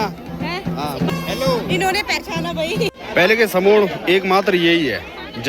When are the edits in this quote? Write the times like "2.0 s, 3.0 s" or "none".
1.1 s, 2.9 s